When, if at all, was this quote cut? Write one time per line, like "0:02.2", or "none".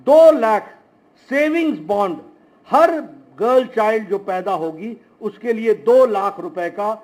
none